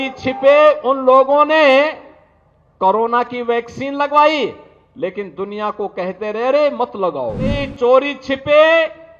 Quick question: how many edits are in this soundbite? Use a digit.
1